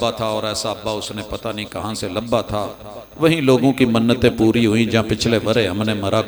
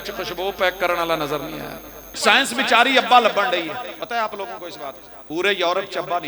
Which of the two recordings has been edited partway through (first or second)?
second